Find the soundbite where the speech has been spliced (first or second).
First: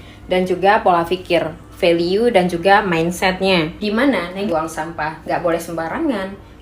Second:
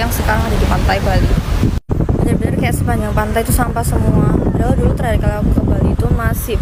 first